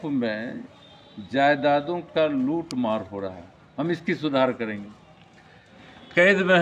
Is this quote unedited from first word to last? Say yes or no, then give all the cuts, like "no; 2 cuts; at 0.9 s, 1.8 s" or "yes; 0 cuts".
no; 1 cut; at 5.7 s